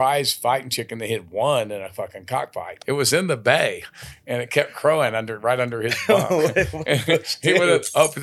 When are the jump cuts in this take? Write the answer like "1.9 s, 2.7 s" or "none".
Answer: 2.7 s